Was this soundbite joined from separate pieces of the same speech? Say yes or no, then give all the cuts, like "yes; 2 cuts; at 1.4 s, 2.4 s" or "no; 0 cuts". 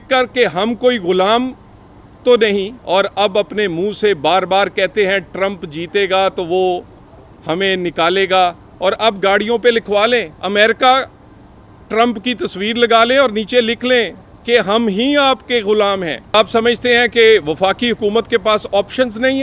yes; 3 cuts; at 2.8 s, 10.3 s, 16.3 s